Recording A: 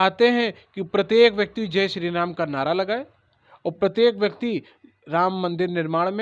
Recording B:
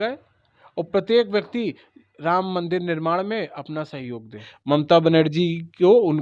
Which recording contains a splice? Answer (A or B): B